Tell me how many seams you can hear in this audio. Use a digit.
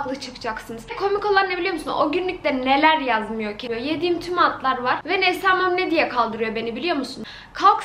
0